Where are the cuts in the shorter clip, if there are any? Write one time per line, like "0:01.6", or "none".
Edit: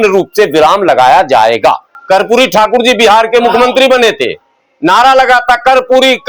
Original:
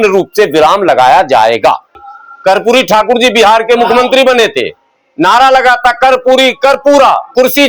0:01.9